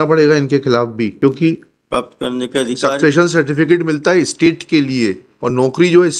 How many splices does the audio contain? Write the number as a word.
one